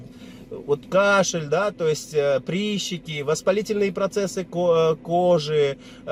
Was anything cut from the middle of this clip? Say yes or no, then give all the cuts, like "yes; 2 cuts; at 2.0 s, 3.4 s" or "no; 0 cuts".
no; 0 cuts